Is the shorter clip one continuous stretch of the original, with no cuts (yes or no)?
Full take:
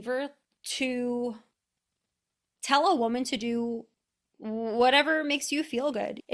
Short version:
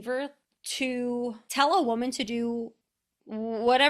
no